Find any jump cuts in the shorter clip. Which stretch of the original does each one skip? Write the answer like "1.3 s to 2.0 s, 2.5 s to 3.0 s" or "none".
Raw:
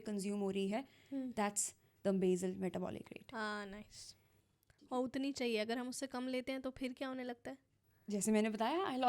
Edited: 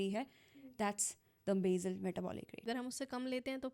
3.2 s to 5.7 s